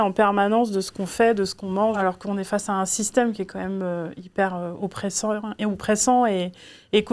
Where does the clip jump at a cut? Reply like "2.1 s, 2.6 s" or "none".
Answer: none